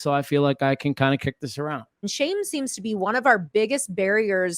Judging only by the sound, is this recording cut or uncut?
cut